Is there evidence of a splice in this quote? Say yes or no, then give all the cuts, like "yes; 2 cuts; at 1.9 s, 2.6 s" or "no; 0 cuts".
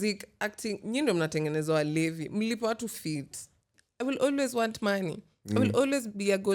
yes; 1 cut; at 3.8 s